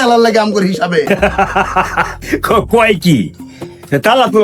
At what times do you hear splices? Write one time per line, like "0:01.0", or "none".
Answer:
0:01.1